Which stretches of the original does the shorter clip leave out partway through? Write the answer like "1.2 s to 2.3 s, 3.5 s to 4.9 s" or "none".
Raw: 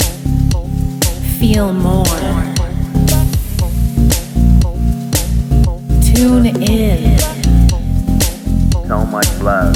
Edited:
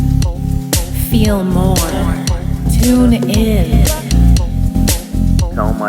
2.9 s to 6.0 s